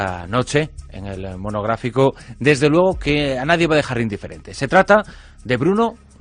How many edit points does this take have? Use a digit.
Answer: 0